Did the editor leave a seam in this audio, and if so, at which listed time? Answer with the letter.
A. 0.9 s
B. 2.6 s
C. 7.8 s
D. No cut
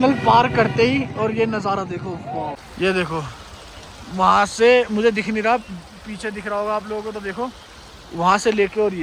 B